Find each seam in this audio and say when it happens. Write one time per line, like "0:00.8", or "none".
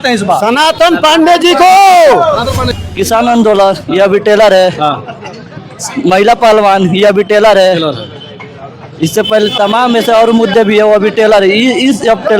0:02.6